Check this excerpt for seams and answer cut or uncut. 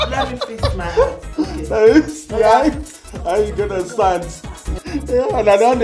cut